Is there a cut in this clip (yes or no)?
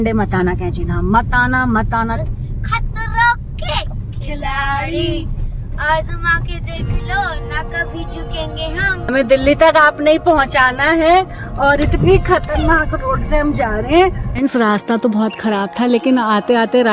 yes